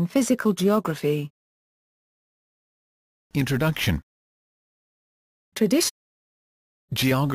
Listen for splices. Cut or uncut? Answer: uncut